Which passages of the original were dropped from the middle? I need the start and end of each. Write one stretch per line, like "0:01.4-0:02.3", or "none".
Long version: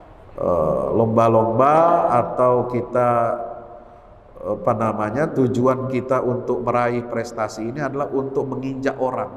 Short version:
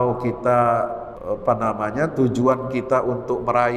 0:03.6-0:04.3

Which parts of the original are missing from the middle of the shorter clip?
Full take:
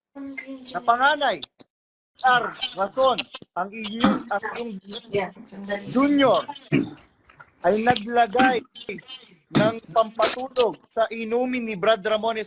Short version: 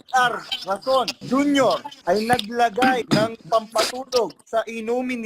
0:03.3-0:05.8
0:06.5-0:07.5
0:08.6-0:09.5

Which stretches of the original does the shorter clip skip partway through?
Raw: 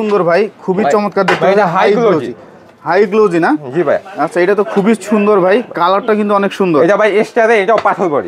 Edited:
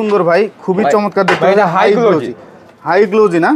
none

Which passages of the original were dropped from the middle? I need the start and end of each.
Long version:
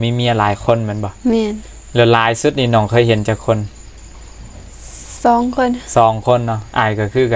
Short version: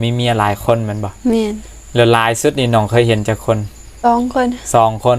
0:03.9-0:05.1

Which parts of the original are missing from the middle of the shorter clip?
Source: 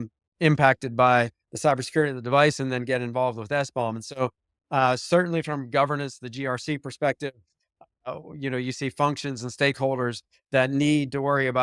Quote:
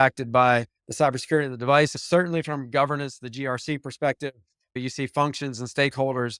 0:02.6-0:05.0
0:07.8-0:08.6

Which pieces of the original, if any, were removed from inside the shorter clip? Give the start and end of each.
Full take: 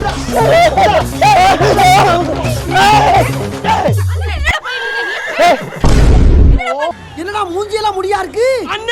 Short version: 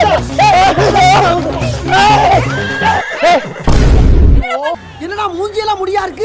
0:03.8-0:05.2

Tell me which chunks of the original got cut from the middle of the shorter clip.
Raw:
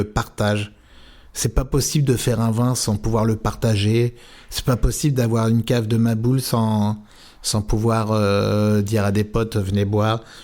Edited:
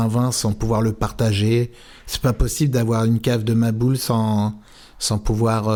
none

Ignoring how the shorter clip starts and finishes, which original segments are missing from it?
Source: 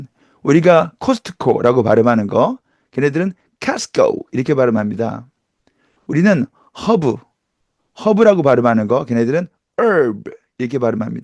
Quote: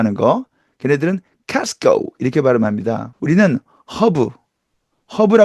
0:05.2-0:06.0

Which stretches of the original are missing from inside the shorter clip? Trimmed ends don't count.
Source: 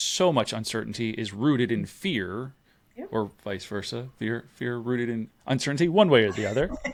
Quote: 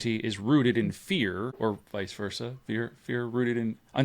0:02.5-0:03.1

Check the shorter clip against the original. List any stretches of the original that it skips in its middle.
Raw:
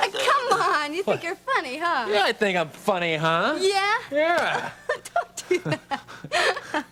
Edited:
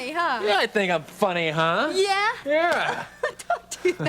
none

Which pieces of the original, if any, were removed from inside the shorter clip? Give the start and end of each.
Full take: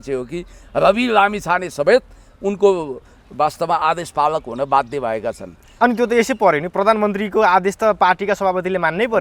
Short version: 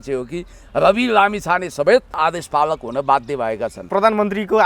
0:02.2-0:03.8
0:05.5-0:06.7

